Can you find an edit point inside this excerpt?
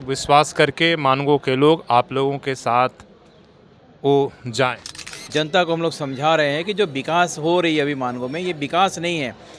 yes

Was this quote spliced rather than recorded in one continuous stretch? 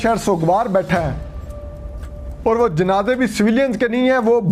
no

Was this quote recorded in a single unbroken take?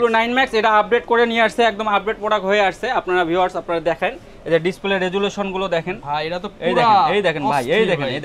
yes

